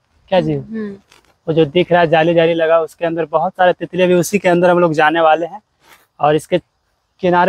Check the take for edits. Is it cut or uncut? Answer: uncut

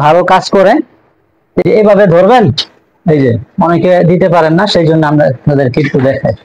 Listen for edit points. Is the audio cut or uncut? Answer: cut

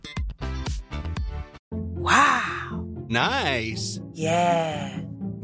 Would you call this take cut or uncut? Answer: cut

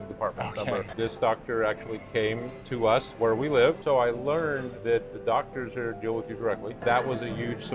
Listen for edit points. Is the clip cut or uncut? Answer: cut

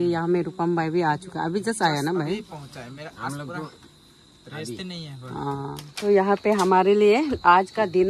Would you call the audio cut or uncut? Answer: cut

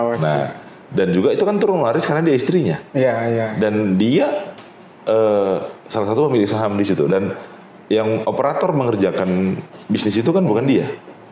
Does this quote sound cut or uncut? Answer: uncut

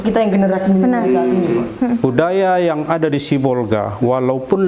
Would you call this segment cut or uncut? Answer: cut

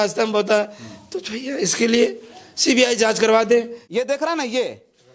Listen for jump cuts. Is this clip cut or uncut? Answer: cut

